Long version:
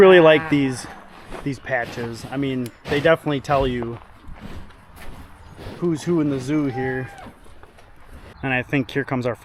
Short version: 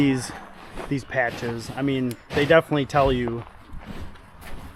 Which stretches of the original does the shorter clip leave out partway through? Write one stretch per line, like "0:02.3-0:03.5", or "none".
none